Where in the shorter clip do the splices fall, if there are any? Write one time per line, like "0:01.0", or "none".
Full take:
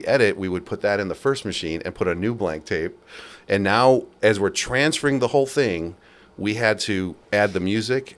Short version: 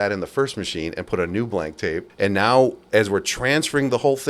0:02.1